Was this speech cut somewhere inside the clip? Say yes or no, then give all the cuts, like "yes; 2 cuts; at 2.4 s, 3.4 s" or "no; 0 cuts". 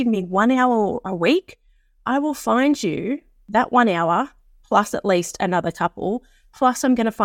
no; 0 cuts